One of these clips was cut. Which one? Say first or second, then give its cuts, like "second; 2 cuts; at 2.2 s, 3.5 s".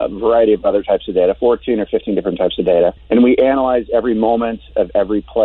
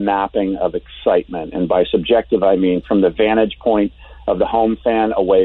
first; 1 cut; at 3.0 s